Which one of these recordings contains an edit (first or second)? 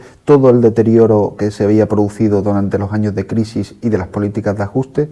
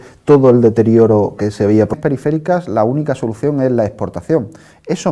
first